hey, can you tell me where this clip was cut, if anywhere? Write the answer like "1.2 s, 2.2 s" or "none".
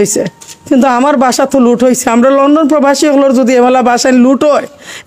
none